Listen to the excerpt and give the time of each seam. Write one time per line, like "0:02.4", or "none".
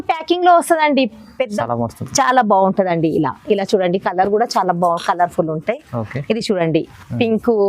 0:01.6